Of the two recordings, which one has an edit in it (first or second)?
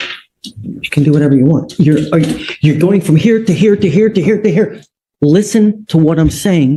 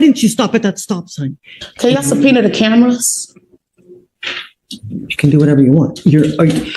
second